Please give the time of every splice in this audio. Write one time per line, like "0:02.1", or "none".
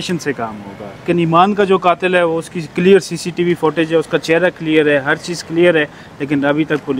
0:01.1